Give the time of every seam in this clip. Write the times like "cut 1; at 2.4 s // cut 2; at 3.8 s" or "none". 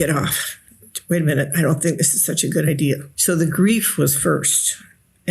cut 1; at 3.1 s